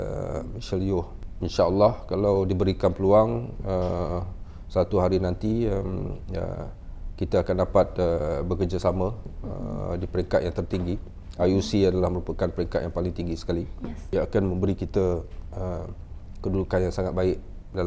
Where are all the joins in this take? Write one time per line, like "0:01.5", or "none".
0:01.2
0:14.0